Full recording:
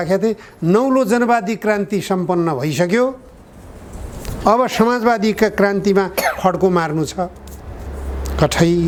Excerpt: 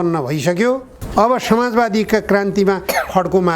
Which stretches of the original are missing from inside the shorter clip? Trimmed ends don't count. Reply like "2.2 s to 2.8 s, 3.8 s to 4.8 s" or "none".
3.3 s to 4.2 s